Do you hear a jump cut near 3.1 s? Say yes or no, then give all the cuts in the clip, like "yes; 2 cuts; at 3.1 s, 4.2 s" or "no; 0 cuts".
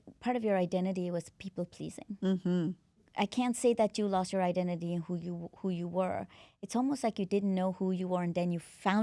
yes; 1 cut; at 3.1 s